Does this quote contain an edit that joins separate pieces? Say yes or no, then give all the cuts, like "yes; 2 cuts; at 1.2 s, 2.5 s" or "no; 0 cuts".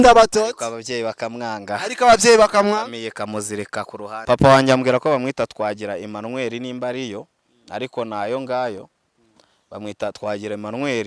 yes; 1 cut; at 4.1 s